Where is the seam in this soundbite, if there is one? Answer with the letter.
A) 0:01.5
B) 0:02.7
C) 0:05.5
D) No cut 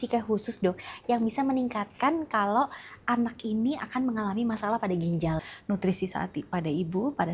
C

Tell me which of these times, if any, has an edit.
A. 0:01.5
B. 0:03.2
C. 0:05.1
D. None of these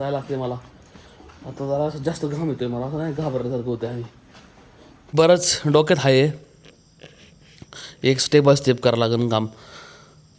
C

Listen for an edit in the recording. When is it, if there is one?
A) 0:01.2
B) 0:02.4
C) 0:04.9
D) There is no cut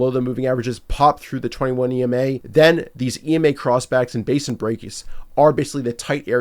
B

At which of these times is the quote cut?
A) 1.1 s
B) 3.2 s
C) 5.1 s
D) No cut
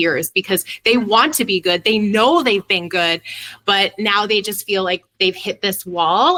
D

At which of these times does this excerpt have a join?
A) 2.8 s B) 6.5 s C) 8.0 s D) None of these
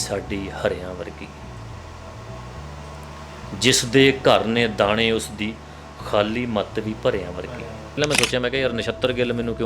C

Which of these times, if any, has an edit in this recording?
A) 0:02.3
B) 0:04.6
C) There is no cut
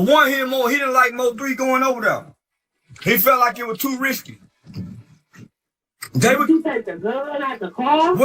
C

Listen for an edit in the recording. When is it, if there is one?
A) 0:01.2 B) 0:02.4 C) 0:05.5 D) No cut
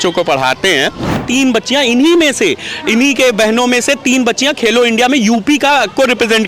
A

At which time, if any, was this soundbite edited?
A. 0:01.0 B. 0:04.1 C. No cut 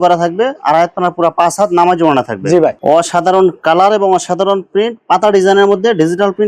C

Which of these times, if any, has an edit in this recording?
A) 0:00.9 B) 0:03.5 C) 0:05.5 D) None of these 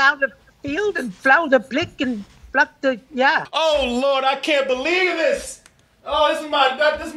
B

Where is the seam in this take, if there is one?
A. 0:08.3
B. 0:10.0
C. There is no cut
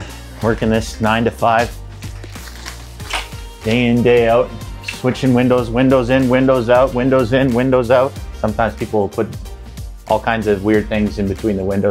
A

